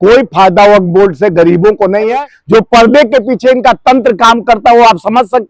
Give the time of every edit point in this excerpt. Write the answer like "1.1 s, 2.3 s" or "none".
2.1 s